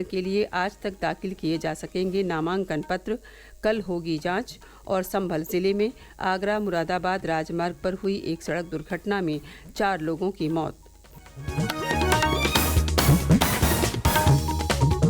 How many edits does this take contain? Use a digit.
1